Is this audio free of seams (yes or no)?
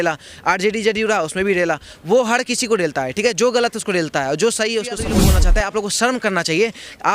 no